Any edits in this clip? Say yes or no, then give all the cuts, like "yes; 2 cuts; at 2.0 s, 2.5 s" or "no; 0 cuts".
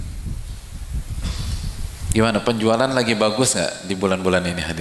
no; 0 cuts